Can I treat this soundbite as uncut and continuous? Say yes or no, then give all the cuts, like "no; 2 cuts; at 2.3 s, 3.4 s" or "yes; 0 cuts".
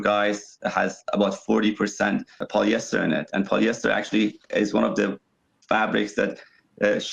no; 1 cut; at 2.4 s